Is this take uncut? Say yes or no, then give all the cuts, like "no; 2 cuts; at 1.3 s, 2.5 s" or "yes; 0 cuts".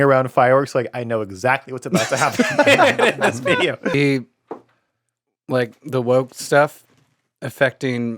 no; 1 cut; at 3.9 s